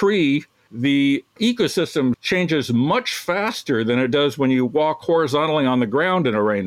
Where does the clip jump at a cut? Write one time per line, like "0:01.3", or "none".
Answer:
0:02.2